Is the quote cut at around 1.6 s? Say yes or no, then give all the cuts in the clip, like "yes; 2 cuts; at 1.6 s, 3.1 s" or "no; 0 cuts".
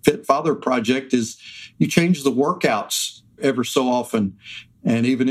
no; 1 cut; at 3.4 s